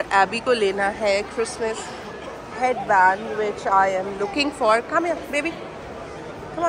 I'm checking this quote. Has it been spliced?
no; 0 cuts

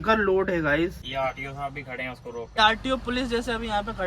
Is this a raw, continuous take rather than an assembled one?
no; 2 cuts; at 1.0 s, 2.6 s

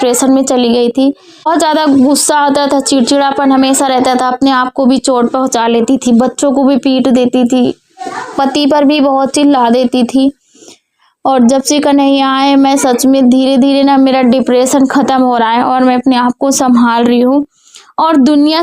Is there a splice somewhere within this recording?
yes; 1 cut; at 1.5 s

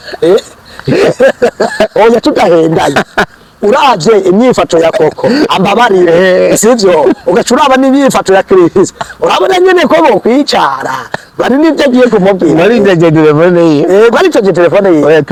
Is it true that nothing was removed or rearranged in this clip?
yes; 0 cuts

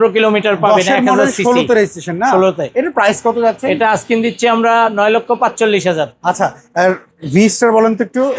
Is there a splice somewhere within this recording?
no; 0 cuts

